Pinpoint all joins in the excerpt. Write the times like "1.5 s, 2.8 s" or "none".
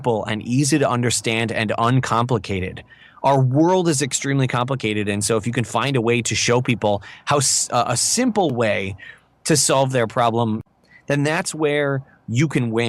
10.6 s